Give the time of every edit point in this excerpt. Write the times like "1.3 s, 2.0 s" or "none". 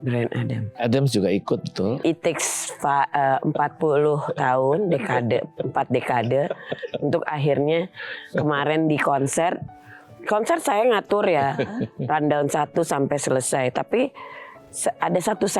2.0 s